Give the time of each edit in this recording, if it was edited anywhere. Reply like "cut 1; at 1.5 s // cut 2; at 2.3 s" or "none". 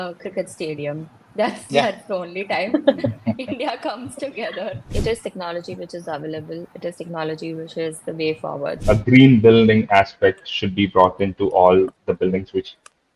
cut 1; at 4.9 s // cut 2; at 8.7 s